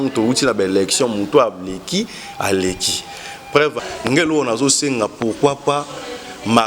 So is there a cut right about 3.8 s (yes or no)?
yes